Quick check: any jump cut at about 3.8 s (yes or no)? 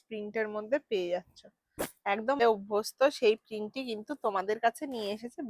no